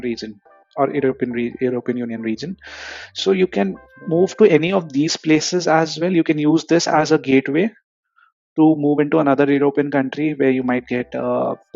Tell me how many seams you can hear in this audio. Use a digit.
0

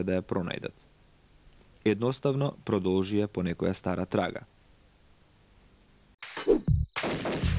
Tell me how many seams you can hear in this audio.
0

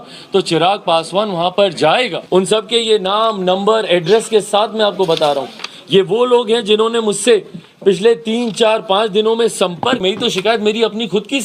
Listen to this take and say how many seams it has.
2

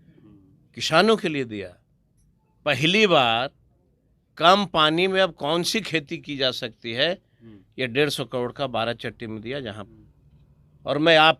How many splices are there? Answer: 1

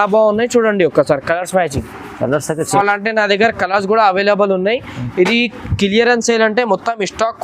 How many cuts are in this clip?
1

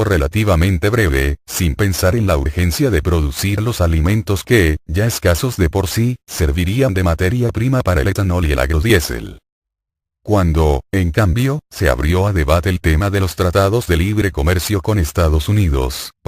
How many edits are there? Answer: 1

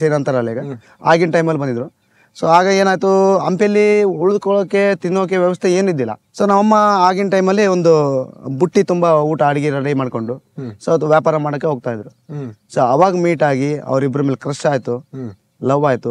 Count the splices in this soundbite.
1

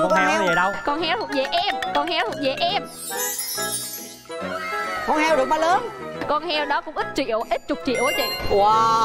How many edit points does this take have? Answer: 0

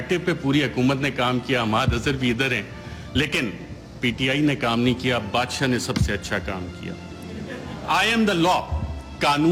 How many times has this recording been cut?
0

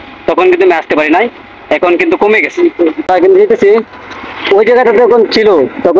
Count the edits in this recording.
1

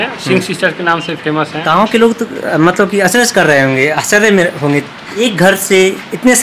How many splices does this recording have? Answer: 2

